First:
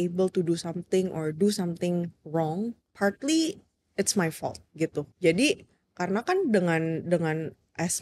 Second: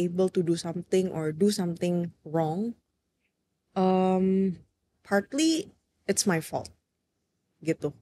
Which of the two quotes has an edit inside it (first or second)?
first